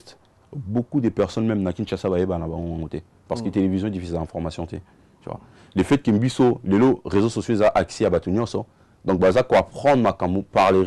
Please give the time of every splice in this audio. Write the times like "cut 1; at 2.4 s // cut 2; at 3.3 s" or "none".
none